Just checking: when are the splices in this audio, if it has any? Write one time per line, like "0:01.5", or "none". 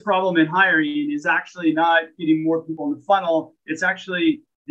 0:02.7